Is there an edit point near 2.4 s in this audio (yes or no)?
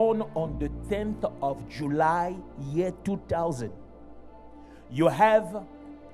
no